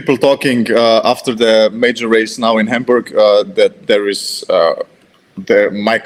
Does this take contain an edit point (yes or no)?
no